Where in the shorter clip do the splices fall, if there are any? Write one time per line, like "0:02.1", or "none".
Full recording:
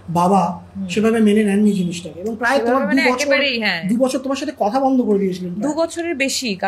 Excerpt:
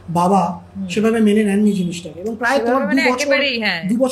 none